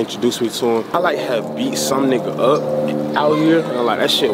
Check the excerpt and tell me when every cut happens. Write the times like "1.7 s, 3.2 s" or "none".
0.9 s